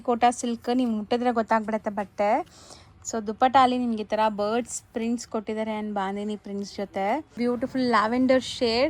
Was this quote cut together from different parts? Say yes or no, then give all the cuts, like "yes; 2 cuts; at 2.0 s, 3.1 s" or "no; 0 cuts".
yes; 1 cut; at 7.4 s